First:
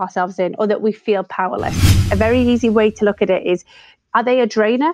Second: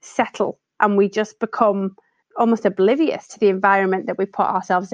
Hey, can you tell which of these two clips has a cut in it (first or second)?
first